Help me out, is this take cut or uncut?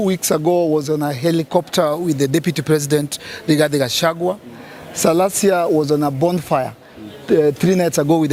uncut